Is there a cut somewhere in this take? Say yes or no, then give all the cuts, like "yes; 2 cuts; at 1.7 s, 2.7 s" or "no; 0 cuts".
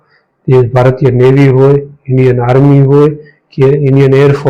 no; 0 cuts